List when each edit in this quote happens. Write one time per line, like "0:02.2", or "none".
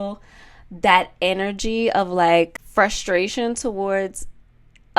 0:02.6